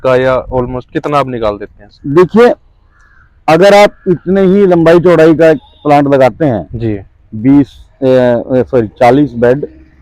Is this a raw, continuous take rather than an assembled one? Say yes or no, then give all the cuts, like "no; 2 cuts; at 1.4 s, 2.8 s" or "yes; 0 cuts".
yes; 0 cuts